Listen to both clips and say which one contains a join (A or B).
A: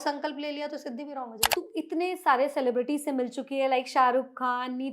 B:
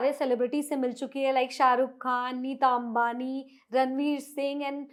A